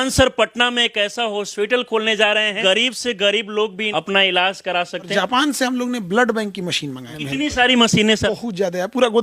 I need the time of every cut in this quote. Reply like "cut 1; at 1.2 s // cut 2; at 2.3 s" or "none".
cut 1; at 2.6 s // cut 2; at 3.8 s // cut 3; at 5.1 s // cut 4; at 7.1 s // cut 5; at 8.2 s